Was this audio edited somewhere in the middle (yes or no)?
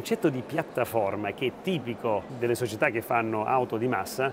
yes